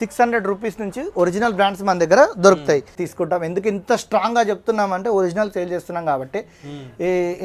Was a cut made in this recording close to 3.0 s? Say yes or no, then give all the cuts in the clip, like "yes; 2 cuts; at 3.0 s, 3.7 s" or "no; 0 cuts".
yes; 1 cut; at 3.0 s